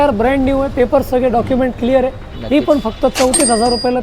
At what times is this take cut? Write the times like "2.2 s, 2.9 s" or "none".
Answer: none

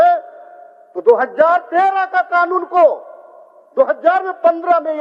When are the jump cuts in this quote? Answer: none

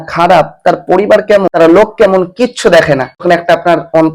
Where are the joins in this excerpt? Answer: 1.5 s, 3.2 s

